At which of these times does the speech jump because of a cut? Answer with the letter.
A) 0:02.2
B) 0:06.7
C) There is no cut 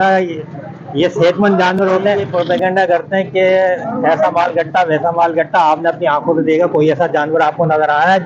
A